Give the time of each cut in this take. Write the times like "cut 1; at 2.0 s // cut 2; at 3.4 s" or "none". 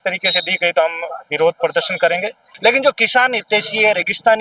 cut 1; at 2.4 s